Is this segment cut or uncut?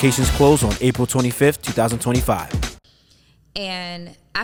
uncut